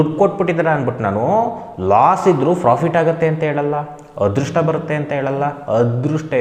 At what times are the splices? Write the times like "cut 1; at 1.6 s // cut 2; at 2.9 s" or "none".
none